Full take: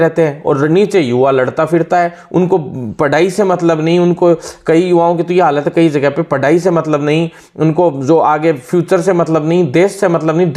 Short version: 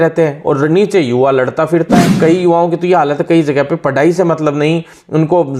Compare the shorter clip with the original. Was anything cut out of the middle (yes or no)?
yes